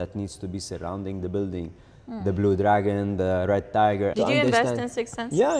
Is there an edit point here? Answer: yes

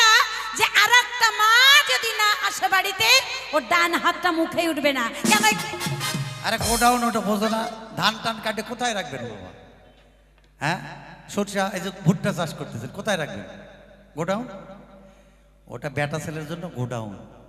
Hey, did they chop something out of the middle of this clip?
no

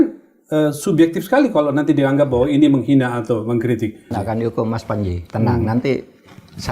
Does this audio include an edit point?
yes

